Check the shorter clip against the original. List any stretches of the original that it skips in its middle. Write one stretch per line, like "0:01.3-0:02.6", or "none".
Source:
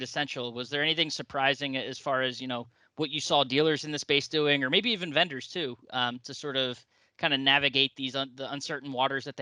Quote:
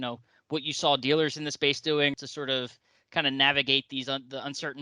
0:04.6-0:06.2